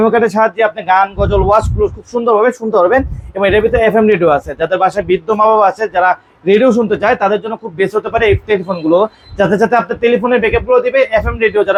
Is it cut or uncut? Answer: uncut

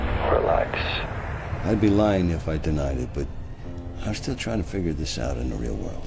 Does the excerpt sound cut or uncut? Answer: uncut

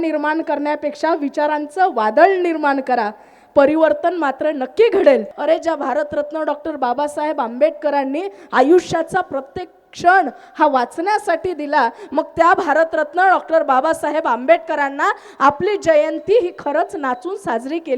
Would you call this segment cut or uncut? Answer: cut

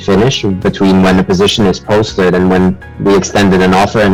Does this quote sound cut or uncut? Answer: uncut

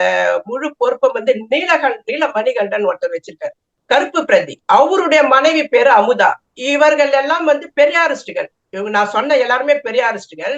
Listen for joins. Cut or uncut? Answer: cut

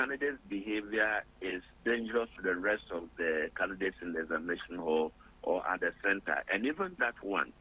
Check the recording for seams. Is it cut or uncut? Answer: uncut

